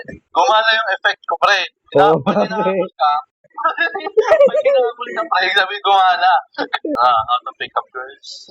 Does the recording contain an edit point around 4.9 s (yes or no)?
no